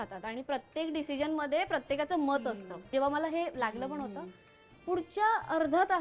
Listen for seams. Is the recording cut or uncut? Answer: cut